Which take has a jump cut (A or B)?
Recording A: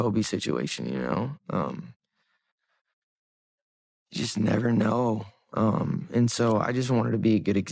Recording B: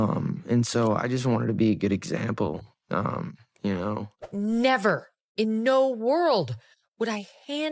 B